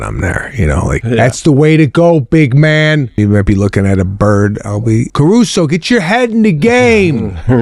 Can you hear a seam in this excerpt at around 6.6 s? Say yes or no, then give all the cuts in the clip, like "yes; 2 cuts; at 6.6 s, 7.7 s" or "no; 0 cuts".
no; 3 cuts; at 1.0 s, 3.2 s, 5.1 s